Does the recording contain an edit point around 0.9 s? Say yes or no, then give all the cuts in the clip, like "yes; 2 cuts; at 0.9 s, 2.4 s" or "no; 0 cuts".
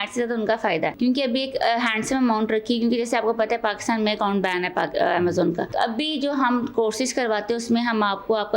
yes; 2 cuts; at 0.9 s, 5.7 s